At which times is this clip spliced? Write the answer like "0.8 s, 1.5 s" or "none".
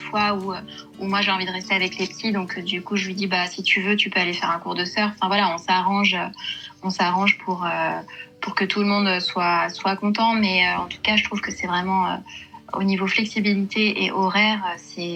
none